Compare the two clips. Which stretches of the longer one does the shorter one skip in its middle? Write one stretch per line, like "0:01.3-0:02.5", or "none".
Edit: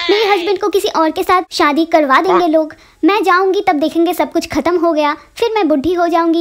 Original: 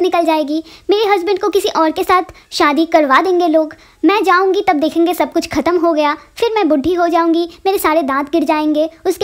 0:02.3-0:02.5